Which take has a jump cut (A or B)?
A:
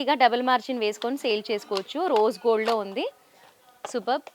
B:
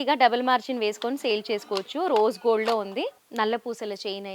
B